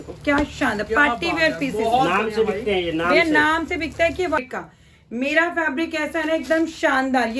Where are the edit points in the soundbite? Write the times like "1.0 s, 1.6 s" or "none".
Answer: 4.4 s